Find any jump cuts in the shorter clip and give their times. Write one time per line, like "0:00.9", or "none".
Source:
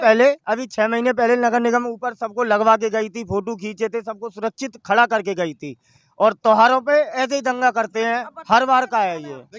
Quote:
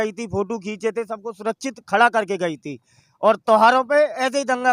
none